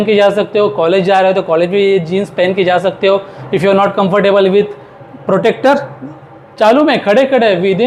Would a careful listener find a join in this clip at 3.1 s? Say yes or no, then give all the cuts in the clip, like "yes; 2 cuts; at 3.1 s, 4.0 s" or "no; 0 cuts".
no; 0 cuts